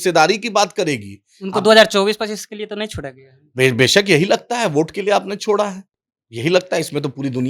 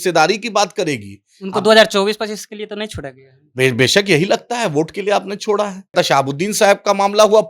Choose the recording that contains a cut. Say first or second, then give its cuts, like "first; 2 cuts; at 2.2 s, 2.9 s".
second; 1 cut; at 5.9 s